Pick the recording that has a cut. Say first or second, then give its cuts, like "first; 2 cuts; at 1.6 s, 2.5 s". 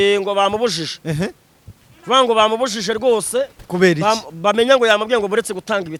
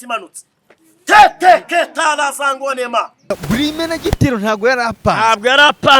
second; 1 cut; at 3.3 s